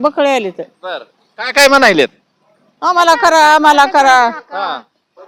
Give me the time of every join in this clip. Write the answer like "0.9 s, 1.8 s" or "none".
none